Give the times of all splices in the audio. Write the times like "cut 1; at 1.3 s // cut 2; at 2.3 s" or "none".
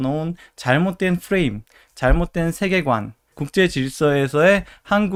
none